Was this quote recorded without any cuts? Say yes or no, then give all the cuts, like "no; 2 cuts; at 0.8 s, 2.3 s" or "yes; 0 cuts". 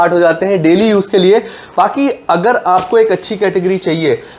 yes; 0 cuts